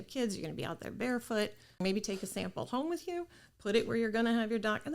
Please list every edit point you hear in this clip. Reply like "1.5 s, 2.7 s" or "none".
1.8 s

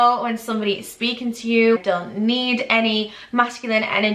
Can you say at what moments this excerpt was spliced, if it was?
1.8 s

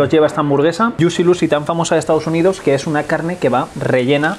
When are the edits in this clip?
0.9 s

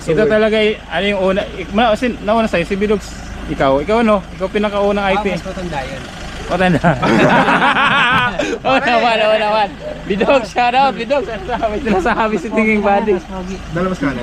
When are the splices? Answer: none

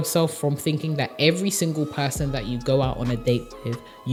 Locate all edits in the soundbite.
none

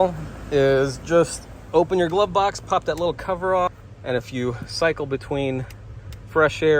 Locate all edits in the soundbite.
3.9 s

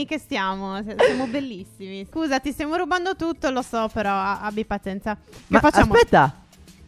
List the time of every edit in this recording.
2.1 s

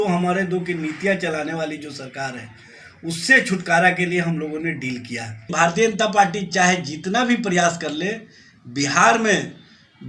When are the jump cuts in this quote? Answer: 5.5 s

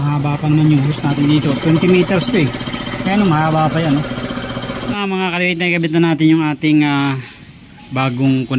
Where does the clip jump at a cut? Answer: 5.0 s

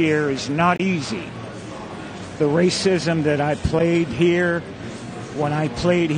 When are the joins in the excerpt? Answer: none

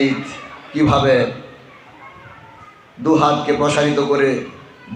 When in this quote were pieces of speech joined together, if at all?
none

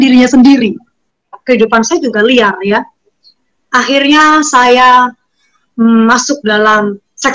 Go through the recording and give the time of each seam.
1.4 s

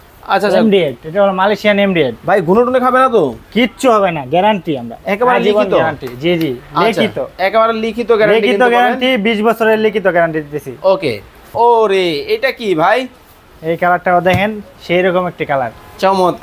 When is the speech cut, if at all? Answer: 11.5 s

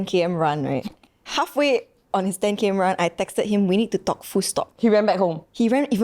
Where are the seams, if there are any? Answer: 1.3 s

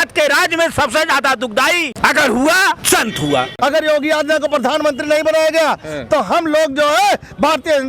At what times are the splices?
1.9 s, 3.3 s

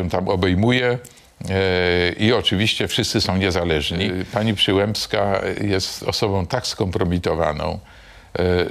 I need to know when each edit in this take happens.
4.2 s

